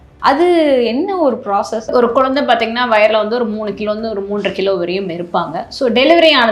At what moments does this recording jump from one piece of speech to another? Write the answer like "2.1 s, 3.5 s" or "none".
1.9 s